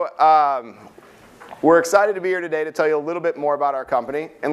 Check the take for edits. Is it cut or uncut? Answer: cut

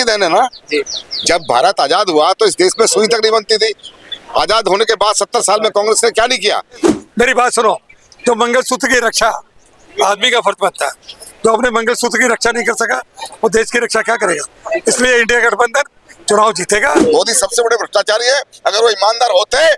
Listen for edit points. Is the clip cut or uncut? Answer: cut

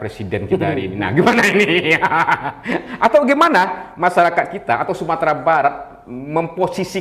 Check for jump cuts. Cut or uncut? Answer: uncut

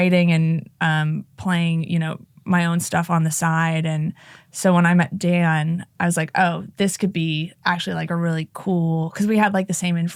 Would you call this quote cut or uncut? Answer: uncut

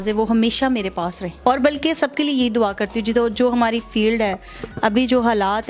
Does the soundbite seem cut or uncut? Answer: uncut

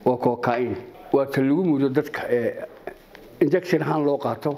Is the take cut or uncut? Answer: cut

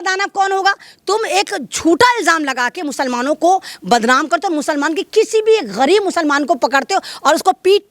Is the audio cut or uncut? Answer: uncut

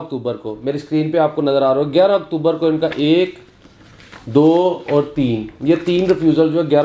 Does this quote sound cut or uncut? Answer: uncut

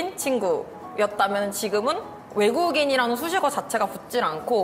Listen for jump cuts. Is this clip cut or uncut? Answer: uncut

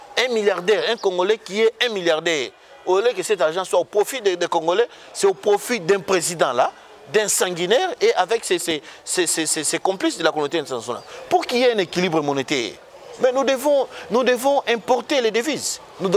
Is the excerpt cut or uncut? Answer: uncut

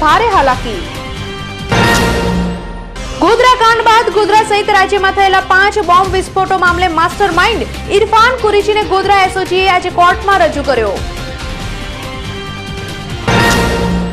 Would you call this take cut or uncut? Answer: uncut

